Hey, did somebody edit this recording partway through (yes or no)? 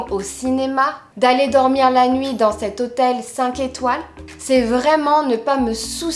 yes